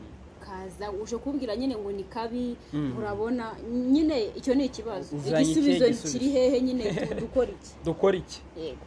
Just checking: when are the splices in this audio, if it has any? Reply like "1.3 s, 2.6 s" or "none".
none